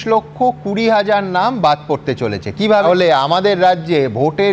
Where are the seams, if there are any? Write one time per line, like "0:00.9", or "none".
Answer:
0:02.8